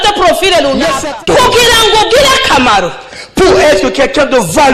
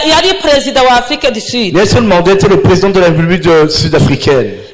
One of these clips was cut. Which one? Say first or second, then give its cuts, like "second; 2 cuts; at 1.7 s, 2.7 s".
first; 1 cut; at 1.1 s